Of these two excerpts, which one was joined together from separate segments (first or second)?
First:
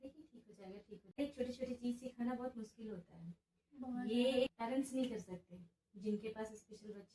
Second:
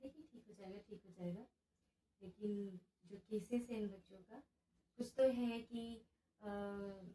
first